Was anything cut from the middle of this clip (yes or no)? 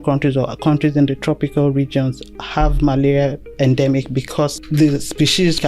yes